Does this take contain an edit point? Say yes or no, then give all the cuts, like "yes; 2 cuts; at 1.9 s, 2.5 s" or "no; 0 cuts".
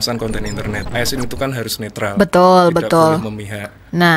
yes; 1 cut; at 0.9 s